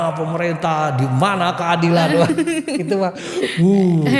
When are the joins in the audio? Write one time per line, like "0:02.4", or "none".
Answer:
none